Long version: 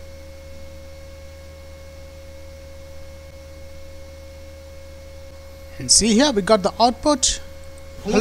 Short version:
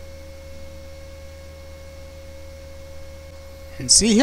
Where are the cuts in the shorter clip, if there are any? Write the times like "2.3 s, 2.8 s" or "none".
3.3 s